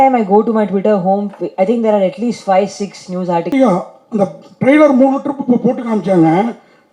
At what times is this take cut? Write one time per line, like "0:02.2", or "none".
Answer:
0:03.5